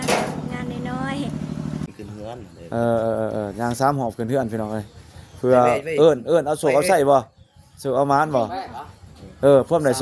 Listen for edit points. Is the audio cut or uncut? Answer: cut